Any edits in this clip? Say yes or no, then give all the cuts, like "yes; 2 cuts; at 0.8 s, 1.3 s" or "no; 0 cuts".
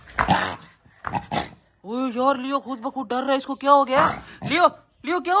no; 0 cuts